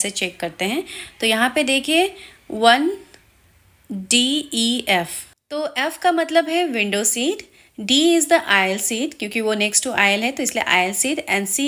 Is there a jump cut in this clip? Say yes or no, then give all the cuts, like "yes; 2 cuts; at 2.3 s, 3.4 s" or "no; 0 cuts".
no; 0 cuts